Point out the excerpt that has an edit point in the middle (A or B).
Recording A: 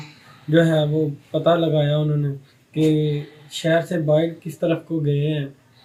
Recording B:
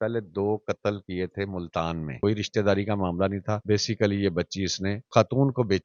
B